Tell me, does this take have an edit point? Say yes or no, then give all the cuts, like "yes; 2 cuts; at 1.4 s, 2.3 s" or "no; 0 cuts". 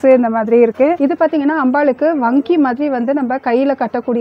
yes; 1 cut; at 1.0 s